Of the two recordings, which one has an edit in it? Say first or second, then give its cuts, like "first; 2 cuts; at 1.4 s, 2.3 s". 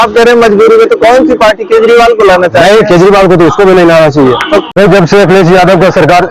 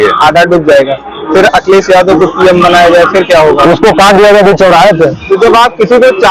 first; 1 cut; at 4.7 s